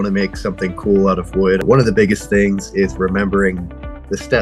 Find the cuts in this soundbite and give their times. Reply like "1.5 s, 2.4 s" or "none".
1.6 s